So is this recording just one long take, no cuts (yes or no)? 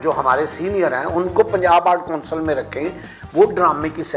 yes